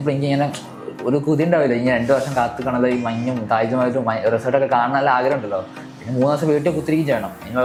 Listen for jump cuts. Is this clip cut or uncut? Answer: uncut